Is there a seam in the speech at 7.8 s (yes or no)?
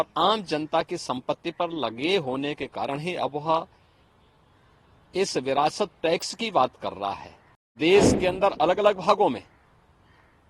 yes